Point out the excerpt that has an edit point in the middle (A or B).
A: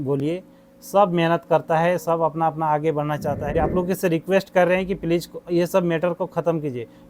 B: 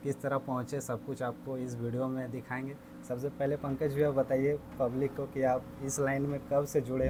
A